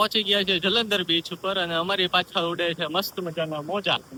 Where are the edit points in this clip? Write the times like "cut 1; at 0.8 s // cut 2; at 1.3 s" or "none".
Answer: none